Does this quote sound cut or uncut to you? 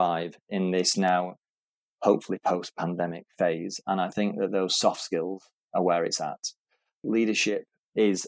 cut